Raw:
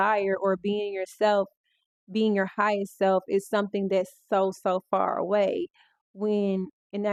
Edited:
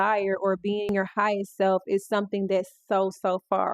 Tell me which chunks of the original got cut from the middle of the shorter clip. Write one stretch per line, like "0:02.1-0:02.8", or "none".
0:00.9-0:02.3